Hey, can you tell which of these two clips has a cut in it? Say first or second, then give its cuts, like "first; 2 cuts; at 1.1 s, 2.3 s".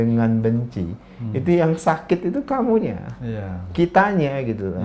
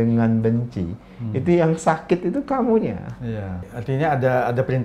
second; 1 cut; at 3.7 s